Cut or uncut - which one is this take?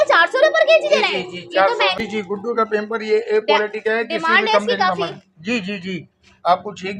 cut